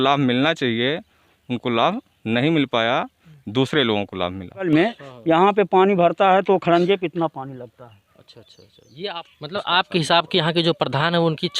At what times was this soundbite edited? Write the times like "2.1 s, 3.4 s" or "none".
4.7 s, 9.3 s